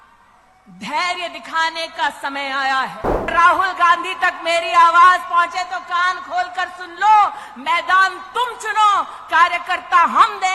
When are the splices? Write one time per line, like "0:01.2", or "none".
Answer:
0:03.3